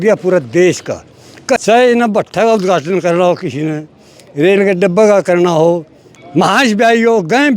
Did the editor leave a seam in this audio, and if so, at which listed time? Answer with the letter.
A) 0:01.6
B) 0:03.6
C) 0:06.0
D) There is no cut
A